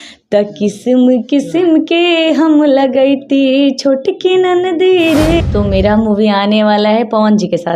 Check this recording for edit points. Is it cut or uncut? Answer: cut